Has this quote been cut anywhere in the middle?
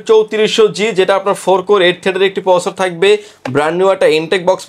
no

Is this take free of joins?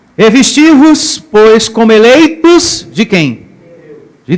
yes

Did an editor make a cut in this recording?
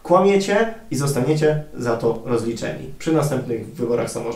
no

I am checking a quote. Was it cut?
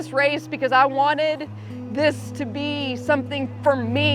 no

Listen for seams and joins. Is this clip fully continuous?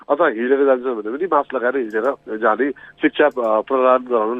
no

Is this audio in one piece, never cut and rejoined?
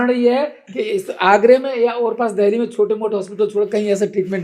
yes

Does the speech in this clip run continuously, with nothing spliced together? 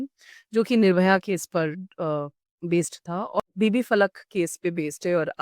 no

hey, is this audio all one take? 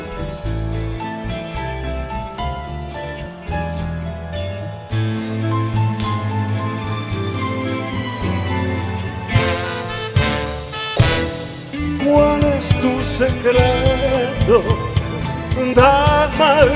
yes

